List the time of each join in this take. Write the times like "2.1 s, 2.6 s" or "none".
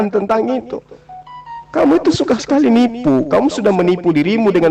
none